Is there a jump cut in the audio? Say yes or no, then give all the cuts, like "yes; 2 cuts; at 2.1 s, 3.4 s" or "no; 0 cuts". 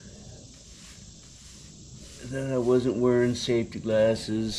no; 0 cuts